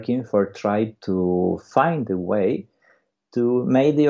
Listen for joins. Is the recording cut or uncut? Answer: cut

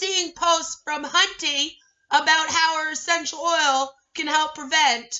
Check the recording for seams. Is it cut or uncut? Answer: uncut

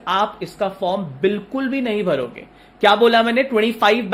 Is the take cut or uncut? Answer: uncut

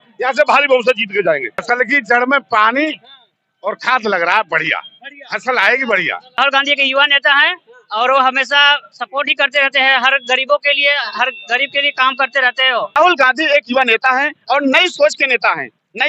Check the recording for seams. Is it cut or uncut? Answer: cut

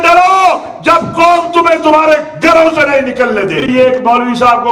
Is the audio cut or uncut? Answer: cut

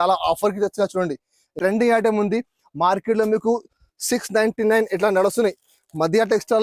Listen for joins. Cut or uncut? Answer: cut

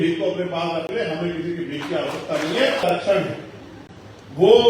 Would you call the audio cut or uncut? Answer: cut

